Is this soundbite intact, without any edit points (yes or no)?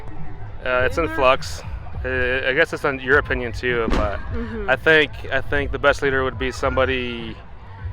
yes